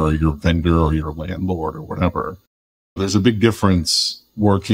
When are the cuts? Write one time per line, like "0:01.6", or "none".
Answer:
0:02.9